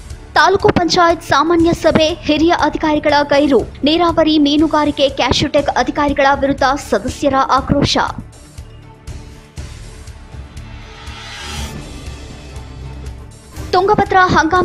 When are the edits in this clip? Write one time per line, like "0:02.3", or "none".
none